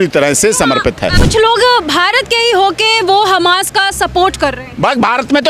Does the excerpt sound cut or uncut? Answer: cut